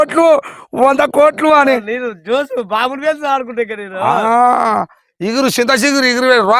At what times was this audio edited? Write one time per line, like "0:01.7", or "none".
none